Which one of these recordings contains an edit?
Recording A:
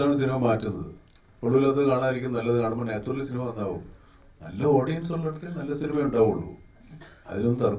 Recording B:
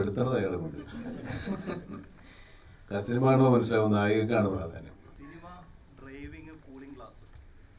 B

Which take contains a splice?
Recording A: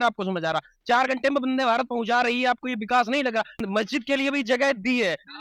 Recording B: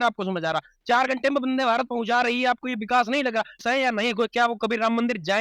B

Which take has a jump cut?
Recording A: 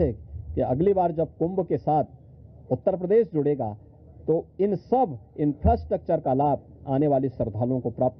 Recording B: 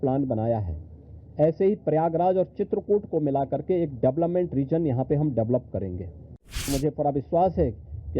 B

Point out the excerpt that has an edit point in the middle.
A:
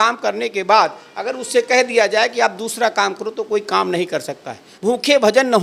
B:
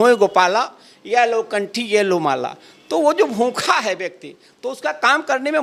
A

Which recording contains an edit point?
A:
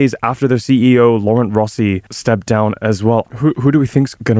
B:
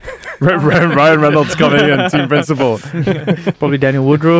A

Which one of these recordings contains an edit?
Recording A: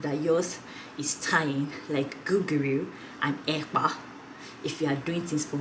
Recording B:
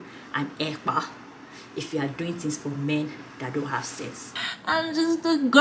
B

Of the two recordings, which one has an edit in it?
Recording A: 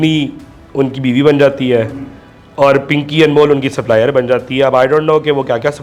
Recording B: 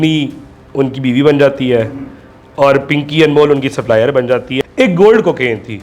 B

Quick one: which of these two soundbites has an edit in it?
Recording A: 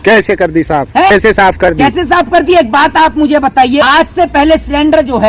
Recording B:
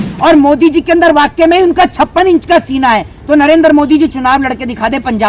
A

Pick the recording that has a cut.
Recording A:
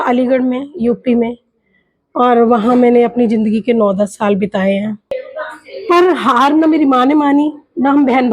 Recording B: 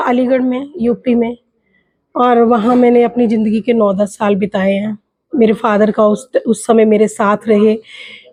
A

